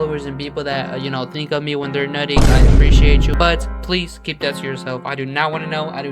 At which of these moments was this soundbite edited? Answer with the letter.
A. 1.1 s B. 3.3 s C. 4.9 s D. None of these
B